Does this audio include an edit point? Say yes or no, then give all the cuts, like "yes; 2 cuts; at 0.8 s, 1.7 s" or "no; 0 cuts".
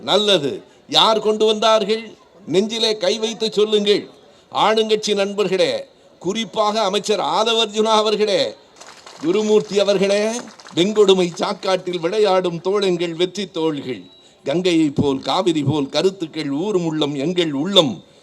yes; 1 cut; at 8.6 s